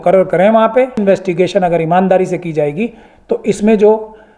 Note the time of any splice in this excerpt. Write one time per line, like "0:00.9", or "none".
0:01.0